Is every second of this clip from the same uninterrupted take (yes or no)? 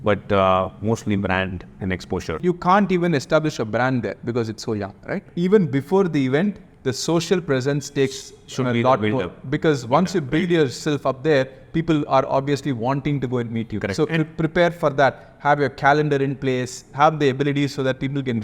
no